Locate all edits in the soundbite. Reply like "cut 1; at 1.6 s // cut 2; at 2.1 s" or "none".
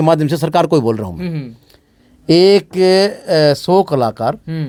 none